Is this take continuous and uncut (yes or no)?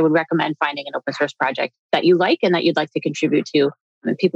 yes